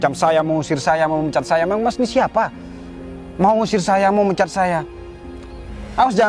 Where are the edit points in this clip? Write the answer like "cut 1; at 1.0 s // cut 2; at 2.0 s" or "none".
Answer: none